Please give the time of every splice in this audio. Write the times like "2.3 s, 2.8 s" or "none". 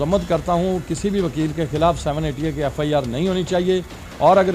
none